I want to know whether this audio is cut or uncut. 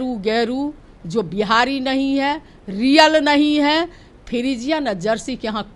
uncut